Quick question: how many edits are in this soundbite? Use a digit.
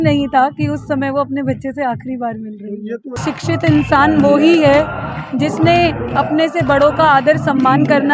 1